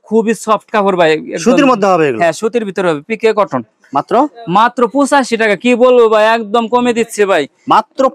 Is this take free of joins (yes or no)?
yes